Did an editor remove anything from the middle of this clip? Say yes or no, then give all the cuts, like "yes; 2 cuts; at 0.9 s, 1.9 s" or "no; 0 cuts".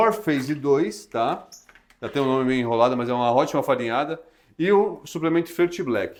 no; 0 cuts